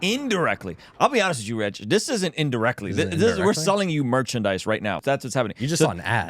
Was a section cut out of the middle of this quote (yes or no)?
yes